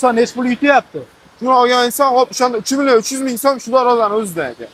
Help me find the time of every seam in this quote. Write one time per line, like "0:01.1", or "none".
none